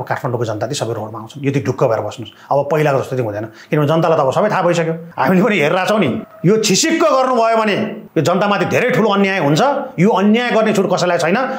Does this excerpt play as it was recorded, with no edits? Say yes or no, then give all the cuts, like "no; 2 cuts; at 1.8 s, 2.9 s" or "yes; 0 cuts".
no; 3 cuts; at 5.1 s, 6.3 s, 8.0 s